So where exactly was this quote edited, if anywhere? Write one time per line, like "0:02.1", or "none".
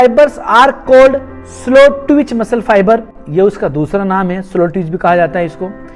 none